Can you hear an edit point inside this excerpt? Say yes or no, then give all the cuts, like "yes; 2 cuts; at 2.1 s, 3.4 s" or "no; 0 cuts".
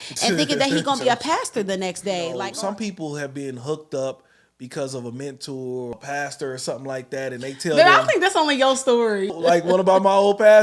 yes; 3 cuts; at 2.4 s, 5.9 s, 9.4 s